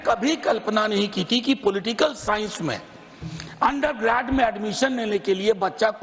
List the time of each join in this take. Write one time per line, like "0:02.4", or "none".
none